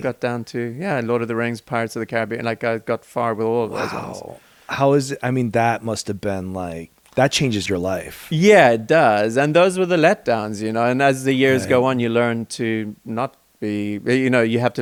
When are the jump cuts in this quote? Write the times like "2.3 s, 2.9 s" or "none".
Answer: none